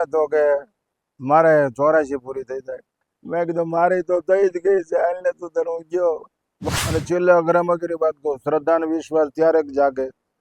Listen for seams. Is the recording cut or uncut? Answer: cut